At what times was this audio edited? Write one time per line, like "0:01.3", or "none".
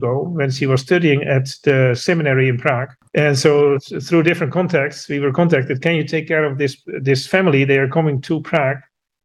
0:03.0